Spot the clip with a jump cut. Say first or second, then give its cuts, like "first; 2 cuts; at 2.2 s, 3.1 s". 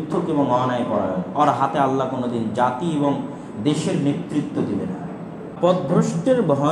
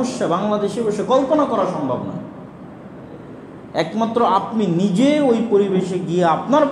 first; 1 cut; at 5.6 s